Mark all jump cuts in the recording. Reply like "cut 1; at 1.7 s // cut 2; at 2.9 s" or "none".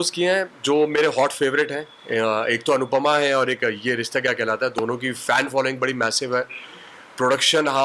none